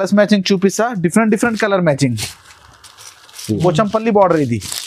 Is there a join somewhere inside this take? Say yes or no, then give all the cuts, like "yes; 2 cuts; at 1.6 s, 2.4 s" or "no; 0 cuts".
yes; 1 cut; at 3.6 s